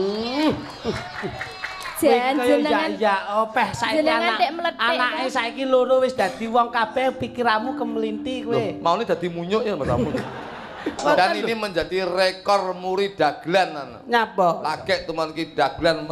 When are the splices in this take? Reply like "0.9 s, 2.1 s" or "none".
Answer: 11.0 s